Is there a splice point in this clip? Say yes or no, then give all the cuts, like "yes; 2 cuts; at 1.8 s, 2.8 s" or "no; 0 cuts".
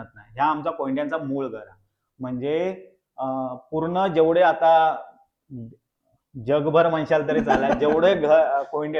no; 0 cuts